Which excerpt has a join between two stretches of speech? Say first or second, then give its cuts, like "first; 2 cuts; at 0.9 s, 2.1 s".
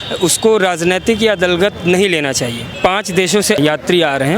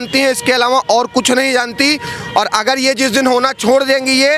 first; 2 cuts; at 2.7 s, 3.6 s